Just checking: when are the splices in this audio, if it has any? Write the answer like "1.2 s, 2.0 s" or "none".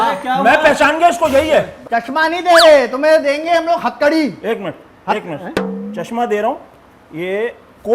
1.8 s